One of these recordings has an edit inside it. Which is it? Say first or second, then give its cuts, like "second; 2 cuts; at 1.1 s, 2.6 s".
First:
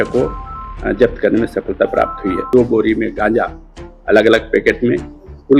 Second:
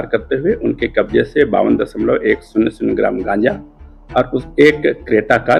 first; 1 cut; at 2.4 s